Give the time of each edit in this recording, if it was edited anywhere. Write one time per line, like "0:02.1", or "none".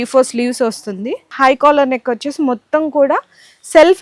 0:01.2